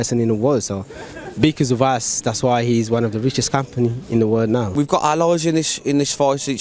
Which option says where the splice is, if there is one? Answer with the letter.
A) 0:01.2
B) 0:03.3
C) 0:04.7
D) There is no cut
C